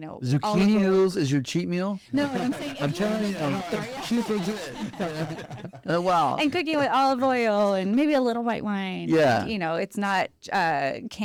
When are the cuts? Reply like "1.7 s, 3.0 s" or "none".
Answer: none

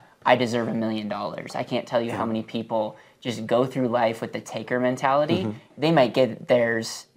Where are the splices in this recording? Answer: 5.7 s

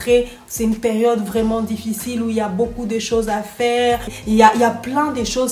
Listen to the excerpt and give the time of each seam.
4.1 s

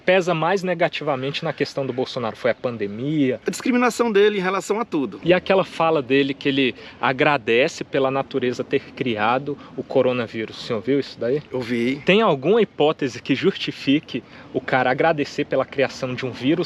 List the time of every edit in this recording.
3.4 s, 5.2 s

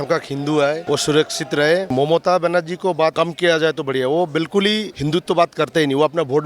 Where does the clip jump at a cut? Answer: 0.8 s, 1.9 s, 3.1 s, 4.9 s

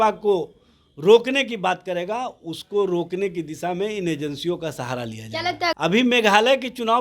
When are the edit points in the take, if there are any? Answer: 5.7 s

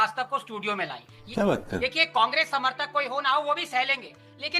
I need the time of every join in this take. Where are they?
1.8 s

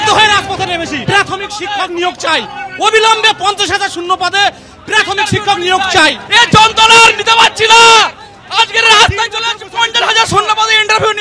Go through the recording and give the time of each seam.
1.0 s, 6.2 s

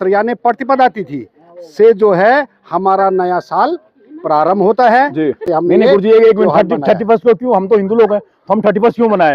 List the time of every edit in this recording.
5.4 s

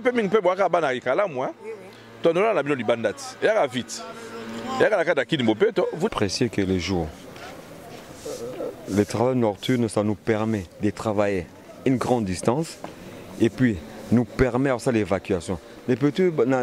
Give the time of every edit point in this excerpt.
6.1 s

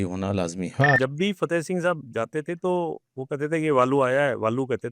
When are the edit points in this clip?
1.0 s

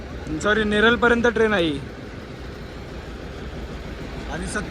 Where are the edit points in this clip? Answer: none

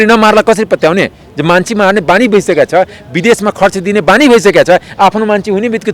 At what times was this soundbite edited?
none

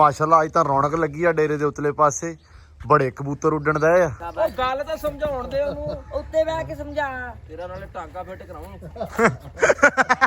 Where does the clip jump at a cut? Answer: 4.2 s

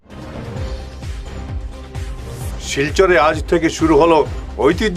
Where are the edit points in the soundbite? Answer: 2.3 s

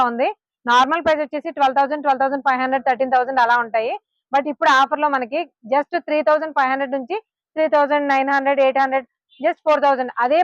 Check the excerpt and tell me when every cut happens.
none

